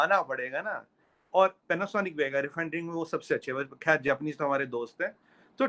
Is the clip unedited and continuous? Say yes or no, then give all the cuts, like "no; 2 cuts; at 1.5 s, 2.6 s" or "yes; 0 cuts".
yes; 0 cuts